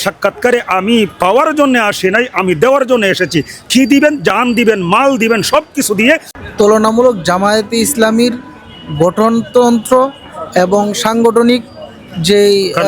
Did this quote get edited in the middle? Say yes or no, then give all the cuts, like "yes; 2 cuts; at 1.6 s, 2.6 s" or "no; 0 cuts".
yes; 1 cut; at 6.3 s